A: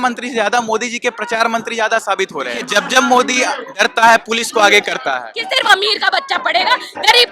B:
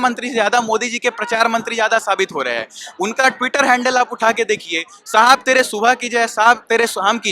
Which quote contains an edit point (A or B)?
A